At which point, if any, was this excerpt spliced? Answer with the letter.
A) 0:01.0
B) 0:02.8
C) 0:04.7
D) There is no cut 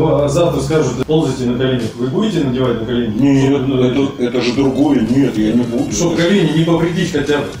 A